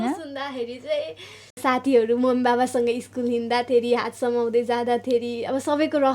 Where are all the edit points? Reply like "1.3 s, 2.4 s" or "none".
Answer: 1.6 s